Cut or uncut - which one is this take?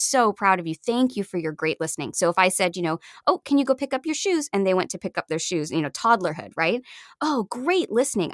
uncut